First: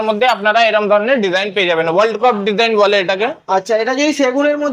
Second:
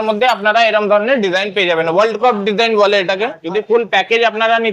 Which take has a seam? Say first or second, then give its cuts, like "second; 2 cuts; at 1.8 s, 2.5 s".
second; 1 cut; at 3.4 s